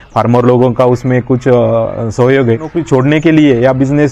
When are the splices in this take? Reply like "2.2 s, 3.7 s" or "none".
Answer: 2.7 s